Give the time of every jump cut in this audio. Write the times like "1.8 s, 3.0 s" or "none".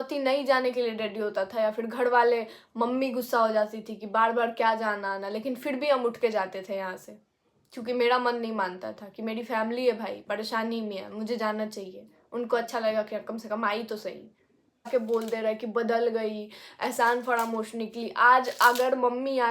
14.9 s